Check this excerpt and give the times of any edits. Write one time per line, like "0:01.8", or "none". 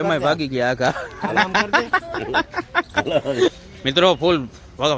0:03.5